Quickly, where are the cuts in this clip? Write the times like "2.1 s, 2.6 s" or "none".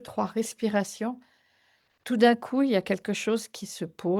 none